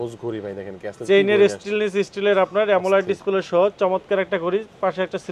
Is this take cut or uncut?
uncut